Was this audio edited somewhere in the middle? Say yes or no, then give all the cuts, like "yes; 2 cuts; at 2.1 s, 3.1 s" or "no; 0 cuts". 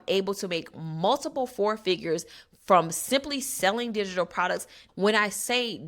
yes; 1 cut; at 4.8 s